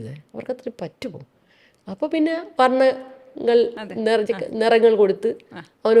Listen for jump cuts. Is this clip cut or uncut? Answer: uncut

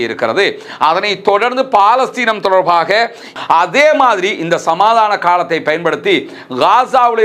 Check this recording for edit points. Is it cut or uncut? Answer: cut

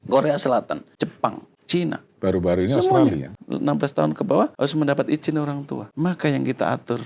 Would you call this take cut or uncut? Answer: cut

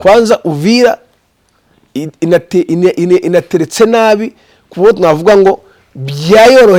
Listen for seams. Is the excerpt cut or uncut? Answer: uncut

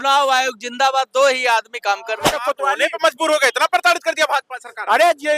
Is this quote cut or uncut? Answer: cut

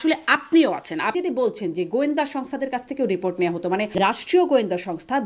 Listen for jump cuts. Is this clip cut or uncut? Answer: cut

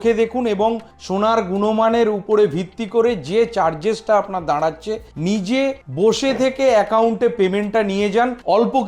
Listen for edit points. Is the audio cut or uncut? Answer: uncut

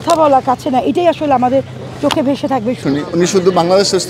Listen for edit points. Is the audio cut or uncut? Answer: cut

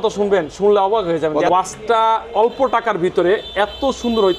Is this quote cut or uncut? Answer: cut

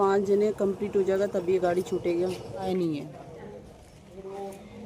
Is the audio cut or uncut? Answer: cut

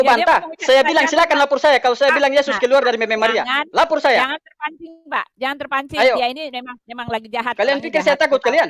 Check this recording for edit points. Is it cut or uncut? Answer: uncut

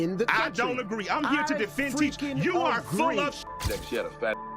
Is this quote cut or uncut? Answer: cut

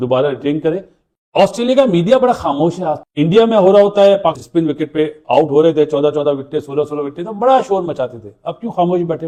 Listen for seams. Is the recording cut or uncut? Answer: uncut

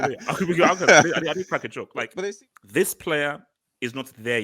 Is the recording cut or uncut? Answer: cut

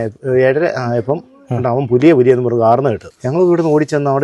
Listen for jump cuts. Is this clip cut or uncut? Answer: cut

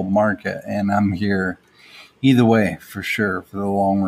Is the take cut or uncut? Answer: uncut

